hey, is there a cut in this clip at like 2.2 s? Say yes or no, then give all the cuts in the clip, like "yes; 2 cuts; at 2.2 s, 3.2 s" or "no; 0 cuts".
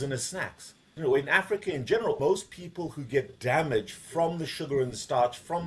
yes; 2 cuts; at 0.9 s, 2.2 s